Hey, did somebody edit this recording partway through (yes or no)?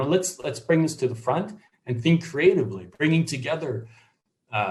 no